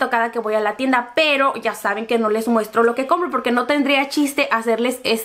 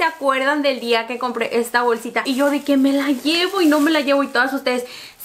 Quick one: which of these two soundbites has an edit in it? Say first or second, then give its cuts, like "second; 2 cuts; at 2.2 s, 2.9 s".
second; 1 cut; at 2.2 s